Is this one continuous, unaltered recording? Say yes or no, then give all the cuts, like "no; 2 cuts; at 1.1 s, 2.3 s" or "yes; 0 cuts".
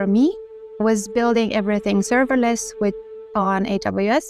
yes; 0 cuts